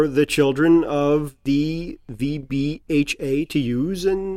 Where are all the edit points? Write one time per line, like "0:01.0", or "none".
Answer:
none

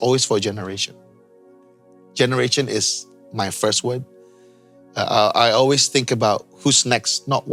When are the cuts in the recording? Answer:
none

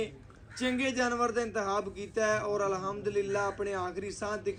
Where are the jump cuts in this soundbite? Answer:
none

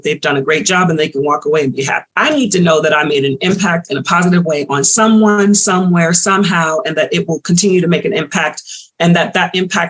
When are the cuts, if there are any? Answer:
0:02.0

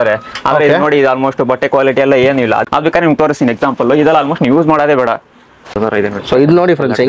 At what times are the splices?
0:02.6
0:05.8

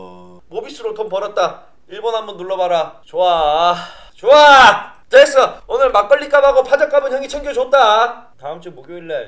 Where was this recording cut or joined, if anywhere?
0:08.3

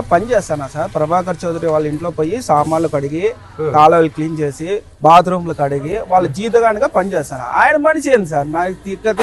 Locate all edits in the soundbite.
none

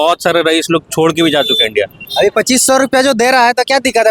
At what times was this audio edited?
0:02.0

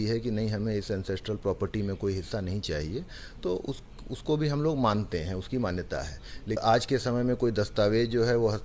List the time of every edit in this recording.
0:06.6

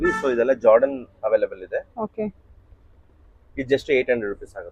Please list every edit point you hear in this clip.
none

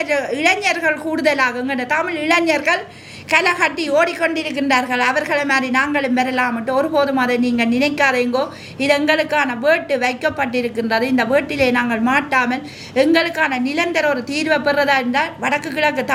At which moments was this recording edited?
none

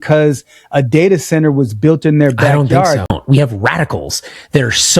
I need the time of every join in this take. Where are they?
0:03.2

